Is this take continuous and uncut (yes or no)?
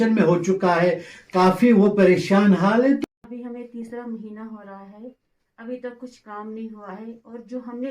no